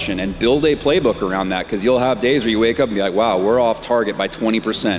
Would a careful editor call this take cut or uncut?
uncut